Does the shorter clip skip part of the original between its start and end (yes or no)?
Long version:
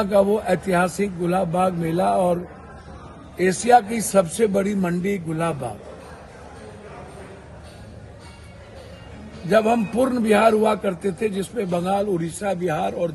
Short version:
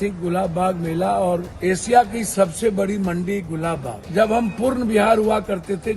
yes